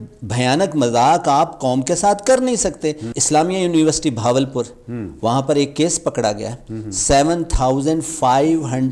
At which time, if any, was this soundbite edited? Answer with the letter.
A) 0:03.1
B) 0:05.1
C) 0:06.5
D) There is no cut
A